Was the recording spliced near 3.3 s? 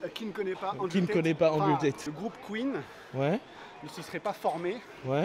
no; 1 cut; at 2.1 s

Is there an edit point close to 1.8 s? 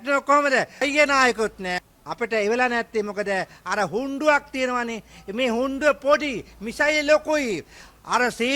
yes; 2 cuts; at 0.8 s, 1.8 s

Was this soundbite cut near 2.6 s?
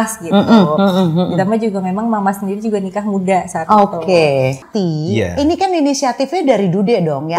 no; 1 cut; at 4.7 s

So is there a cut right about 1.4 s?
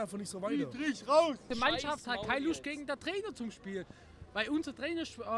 yes; 1 cut; at 1.4 s

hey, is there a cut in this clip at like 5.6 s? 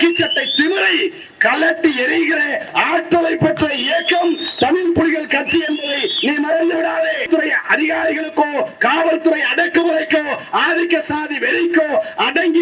no; 1 cut; at 7.3 s

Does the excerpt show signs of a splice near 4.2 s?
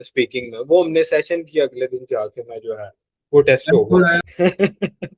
yes; 1 cut; at 4.2 s

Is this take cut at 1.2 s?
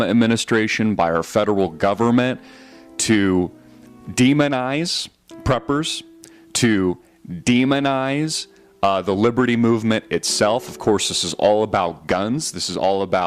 yes; 1 cut; at 1.2 s

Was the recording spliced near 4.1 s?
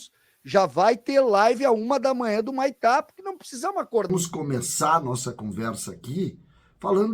yes; 1 cut; at 4.1 s

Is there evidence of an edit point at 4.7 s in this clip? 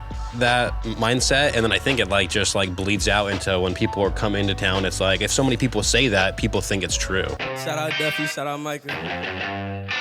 no; 1 cut; at 7.5 s

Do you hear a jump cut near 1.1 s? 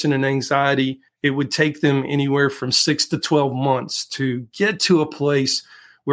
yes; 1 cut; at 1.1 s

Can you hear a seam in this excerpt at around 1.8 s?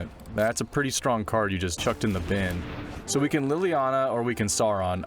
yes; 2 cuts; at 1.8 s, 3.0 s

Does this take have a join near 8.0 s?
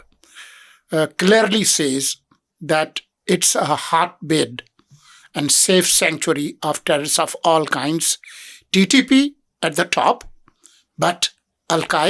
no; 0 cuts

